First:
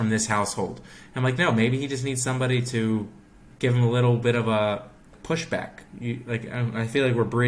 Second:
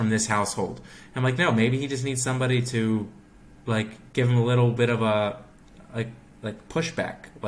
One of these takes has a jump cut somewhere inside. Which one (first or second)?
first